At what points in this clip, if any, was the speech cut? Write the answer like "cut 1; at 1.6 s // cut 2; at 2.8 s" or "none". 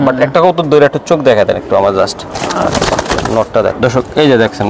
none